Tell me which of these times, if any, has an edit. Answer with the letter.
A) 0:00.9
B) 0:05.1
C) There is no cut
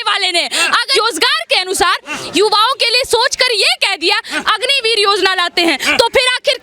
A